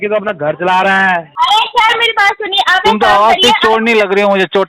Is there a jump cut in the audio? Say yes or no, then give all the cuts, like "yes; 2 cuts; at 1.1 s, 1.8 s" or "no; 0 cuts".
yes; 1 cut; at 1.3 s